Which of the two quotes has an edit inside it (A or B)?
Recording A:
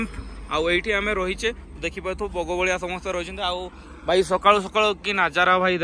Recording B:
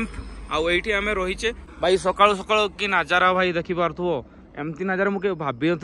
B